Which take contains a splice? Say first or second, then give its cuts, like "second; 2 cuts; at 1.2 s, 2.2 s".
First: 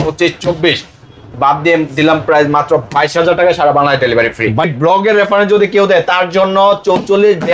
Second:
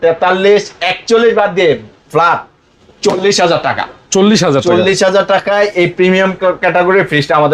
first; 1 cut; at 4.7 s